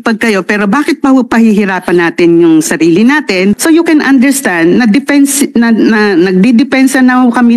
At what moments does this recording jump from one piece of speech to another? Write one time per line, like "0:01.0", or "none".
0:03.6